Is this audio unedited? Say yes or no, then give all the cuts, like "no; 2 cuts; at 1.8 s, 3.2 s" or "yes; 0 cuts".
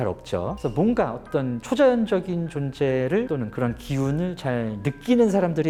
yes; 0 cuts